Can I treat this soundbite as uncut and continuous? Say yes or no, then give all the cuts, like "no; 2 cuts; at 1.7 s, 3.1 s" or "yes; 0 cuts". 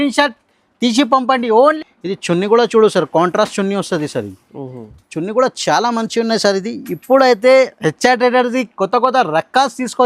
no; 1 cut; at 1.8 s